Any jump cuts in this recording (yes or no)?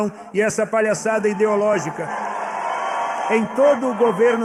no